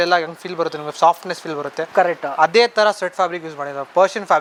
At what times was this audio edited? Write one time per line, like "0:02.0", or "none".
none